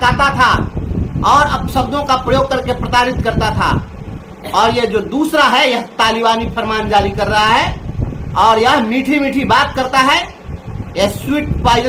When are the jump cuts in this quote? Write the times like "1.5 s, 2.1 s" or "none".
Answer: none